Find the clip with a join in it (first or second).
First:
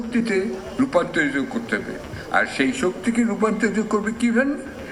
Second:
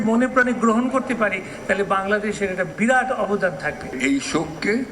second